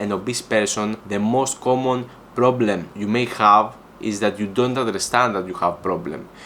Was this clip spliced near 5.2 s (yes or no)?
no